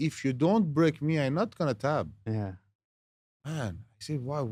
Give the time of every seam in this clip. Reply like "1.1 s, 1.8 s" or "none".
none